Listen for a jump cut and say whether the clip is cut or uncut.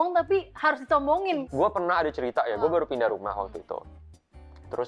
cut